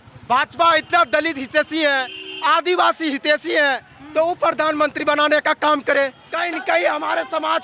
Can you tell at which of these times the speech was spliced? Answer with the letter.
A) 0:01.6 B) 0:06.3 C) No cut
B